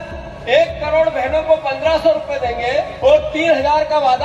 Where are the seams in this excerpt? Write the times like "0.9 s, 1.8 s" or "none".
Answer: 2.9 s